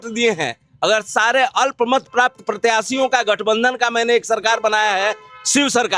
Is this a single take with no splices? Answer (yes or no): yes